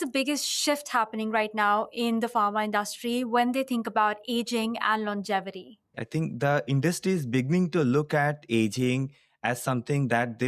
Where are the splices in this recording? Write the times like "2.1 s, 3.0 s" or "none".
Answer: 6.0 s